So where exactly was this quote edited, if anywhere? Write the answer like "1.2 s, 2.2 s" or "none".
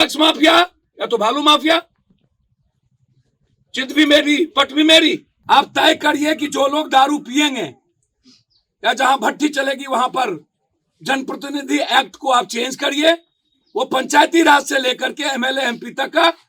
5.3 s